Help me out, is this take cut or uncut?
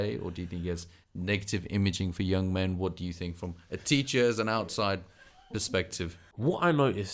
cut